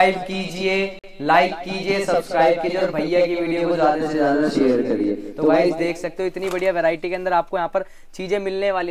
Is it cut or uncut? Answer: uncut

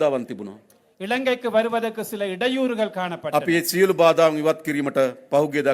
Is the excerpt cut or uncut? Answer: uncut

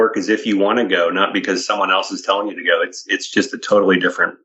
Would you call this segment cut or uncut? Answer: uncut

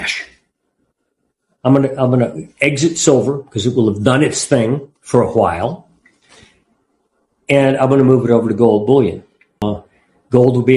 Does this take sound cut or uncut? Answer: cut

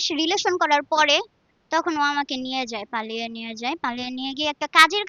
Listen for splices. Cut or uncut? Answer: uncut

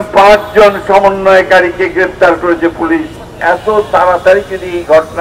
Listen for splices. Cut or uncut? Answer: cut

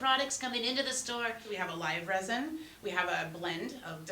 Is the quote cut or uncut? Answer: cut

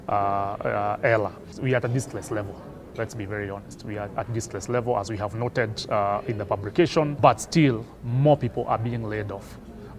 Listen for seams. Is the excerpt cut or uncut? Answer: cut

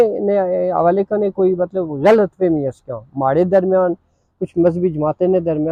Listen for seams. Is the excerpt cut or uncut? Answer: uncut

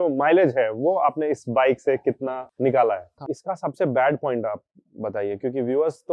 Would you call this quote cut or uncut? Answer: cut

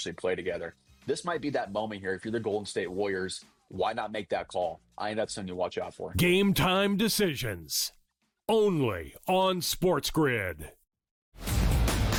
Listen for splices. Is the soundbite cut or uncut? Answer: uncut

